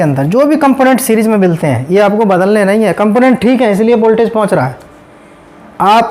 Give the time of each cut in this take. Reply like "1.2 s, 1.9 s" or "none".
none